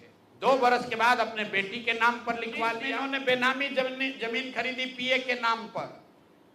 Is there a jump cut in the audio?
yes; 1 cut; at 3.2 s

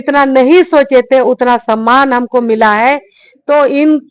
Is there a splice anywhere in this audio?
no; 0 cuts

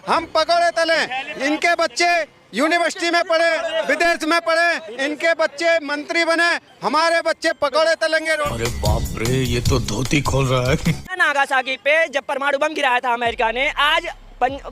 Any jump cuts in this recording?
yes; 2 cuts; at 8.6 s, 11.1 s

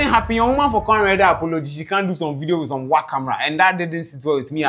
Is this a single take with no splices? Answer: yes; 0 cuts

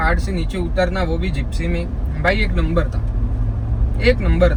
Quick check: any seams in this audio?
no; 0 cuts

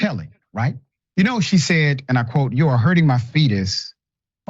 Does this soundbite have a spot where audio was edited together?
yes; 1 cut; at 0.9 s

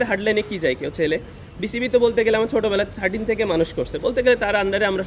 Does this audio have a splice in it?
no; 0 cuts

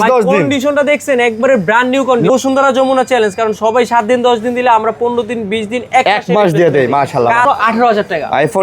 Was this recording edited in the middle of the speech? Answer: yes; 2 cuts; at 2.3 s, 7.4 s

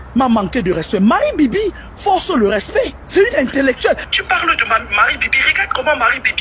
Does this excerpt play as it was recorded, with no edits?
no; 2 cuts; at 3.0 s, 4.1 s

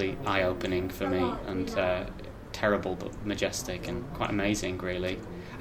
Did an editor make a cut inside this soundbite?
yes; 1 cut; at 4.1 s

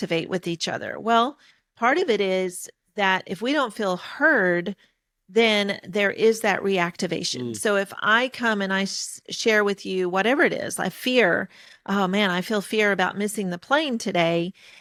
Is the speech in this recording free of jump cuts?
yes; 0 cuts

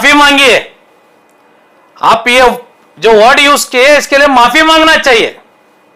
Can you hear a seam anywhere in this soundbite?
no; 0 cuts

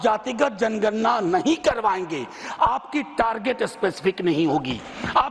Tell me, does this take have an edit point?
no; 0 cuts

